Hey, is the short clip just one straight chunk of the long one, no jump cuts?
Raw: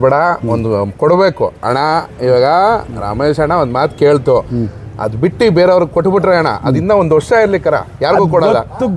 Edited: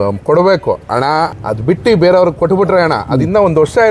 no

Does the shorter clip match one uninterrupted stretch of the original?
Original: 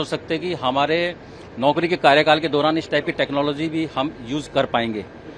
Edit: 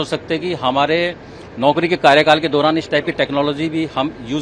yes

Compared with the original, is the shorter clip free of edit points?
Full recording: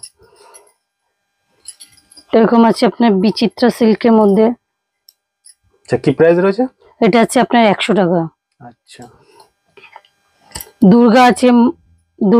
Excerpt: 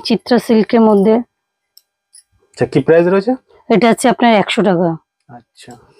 yes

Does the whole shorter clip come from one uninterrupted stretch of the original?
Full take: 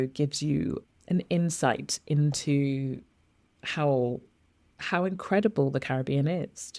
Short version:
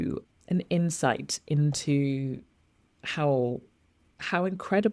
yes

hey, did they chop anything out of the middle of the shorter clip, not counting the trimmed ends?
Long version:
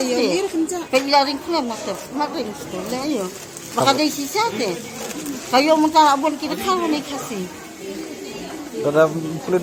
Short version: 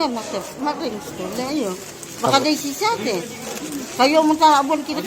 no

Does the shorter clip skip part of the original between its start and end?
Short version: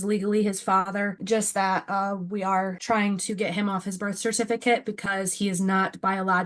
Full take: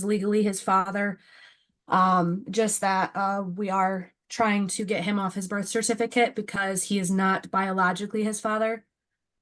yes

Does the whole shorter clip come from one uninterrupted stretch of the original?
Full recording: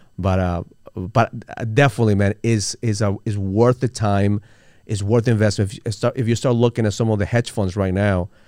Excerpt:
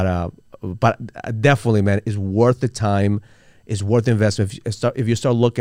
no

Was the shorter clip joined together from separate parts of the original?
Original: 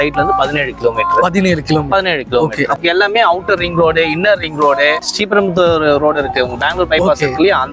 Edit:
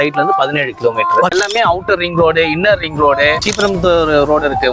yes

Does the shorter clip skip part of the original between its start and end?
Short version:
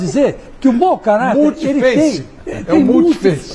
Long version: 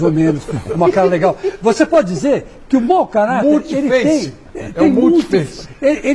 no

